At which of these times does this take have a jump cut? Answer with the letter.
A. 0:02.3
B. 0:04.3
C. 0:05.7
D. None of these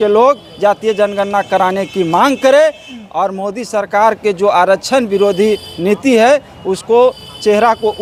D